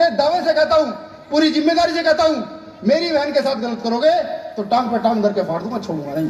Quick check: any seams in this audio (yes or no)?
no